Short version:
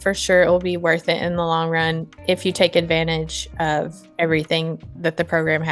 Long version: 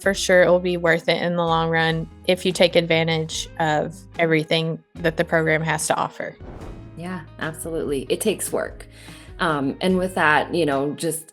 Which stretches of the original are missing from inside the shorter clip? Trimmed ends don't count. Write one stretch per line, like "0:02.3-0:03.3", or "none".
none